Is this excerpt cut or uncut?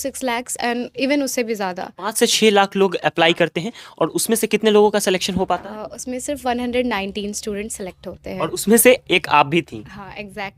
uncut